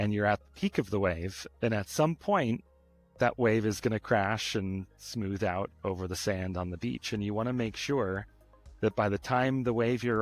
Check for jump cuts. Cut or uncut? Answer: uncut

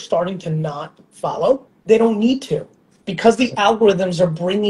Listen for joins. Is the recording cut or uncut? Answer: cut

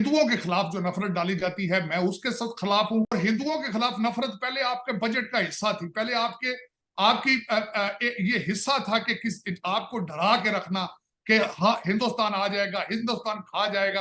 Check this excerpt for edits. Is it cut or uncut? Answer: cut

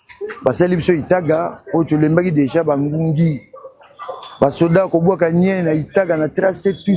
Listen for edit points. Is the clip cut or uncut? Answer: uncut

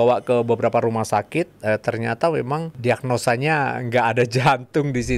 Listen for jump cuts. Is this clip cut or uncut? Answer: cut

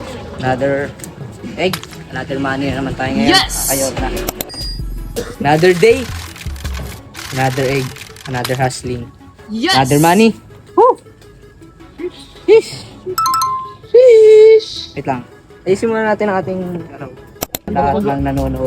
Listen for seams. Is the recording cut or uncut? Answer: cut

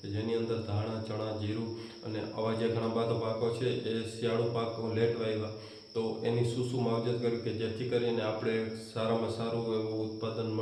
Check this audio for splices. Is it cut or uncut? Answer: uncut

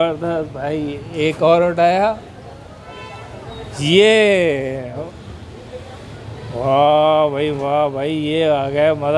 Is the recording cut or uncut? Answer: cut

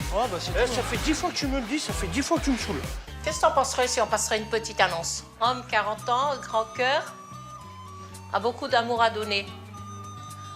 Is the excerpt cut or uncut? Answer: cut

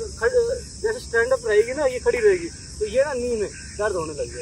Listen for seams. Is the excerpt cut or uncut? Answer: uncut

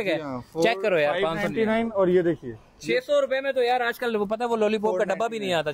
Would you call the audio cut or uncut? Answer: uncut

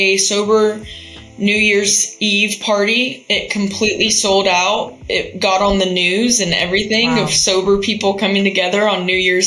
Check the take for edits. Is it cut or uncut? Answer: uncut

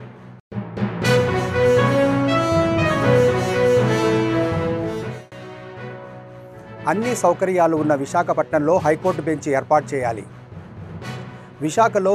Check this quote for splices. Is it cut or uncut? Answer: uncut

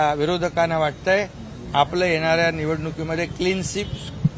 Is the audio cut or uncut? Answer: uncut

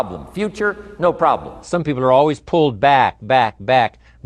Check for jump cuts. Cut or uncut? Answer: cut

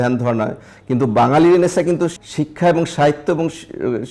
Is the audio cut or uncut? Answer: cut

